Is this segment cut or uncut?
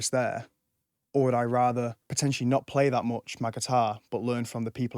cut